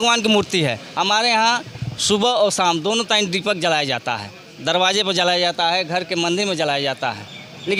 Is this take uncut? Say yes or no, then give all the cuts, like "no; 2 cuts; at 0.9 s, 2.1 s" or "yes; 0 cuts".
yes; 0 cuts